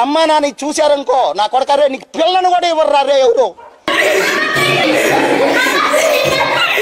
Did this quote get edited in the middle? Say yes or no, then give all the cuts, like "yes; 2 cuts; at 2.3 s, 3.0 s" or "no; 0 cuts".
yes; 1 cut; at 4.8 s